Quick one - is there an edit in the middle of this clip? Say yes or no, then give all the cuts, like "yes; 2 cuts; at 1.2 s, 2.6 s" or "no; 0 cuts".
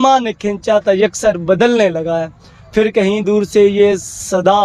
no; 0 cuts